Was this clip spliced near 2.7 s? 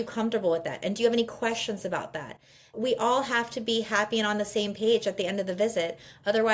yes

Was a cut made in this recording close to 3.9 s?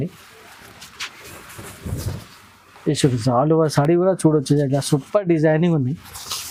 no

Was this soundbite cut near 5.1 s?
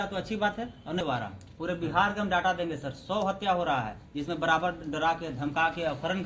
no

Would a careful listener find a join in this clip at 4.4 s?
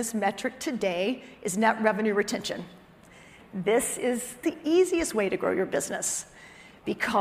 yes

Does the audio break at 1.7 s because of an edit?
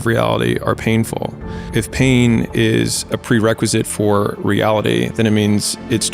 yes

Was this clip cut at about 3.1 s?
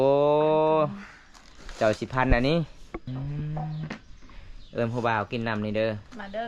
yes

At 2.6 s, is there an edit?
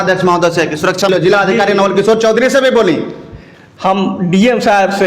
no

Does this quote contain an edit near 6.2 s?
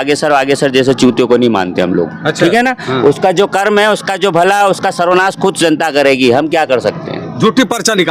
no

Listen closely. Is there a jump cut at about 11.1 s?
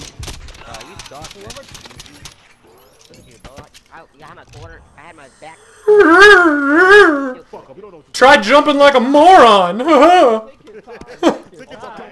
no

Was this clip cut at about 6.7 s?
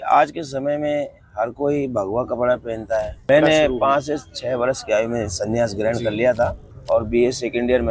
yes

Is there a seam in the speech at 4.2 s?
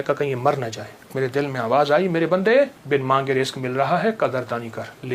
no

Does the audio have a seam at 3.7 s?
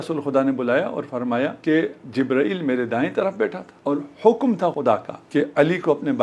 yes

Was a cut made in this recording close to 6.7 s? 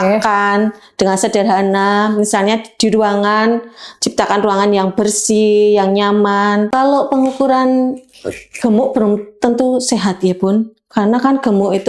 yes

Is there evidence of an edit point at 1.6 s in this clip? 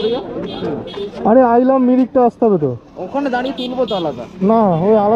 no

